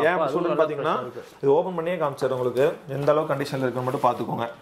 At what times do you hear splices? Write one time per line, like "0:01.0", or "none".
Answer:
none